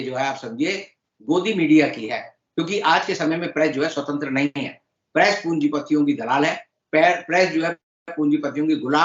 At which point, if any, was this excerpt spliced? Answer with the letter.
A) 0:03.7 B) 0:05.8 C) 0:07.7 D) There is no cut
D